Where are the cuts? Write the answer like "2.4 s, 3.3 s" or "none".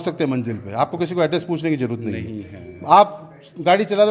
none